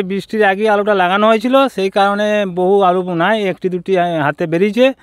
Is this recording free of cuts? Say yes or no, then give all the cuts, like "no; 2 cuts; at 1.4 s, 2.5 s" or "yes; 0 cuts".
yes; 0 cuts